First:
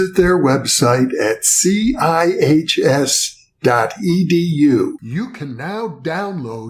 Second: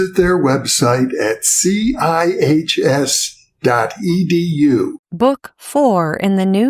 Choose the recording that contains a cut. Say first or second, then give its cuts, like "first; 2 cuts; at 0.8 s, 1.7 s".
second; 1 cut; at 5.0 s